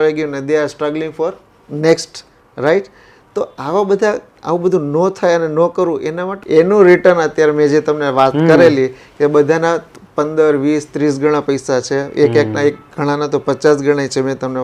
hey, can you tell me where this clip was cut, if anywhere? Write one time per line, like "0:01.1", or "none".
0:06.3